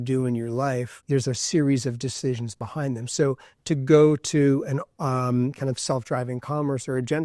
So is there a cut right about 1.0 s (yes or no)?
yes